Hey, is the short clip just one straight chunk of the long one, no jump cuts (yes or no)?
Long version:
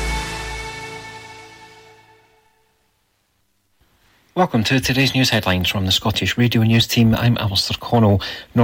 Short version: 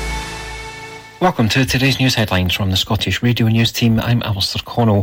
no